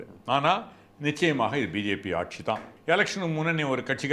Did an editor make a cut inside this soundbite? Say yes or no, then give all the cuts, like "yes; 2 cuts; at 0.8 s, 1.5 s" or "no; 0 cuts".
yes; 1 cut; at 2.7 s